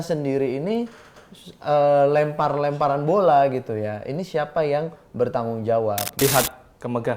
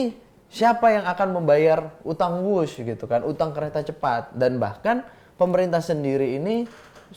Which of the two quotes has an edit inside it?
first; 1 cut; at 6.2 s

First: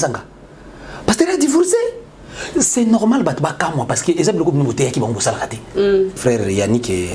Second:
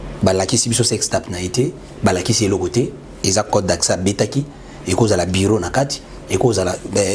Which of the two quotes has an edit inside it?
first; 1 cut; at 6.2 s

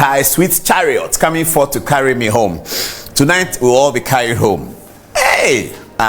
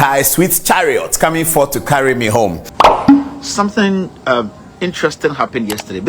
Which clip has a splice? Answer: second; 2 cuts; at 2.7 s, 3.2 s

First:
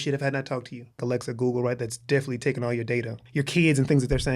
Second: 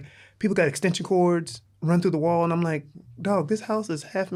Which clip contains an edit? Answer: first; 2 cuts; at 1.0 s, 3.2 s

